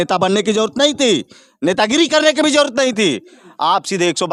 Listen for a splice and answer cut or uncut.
uncut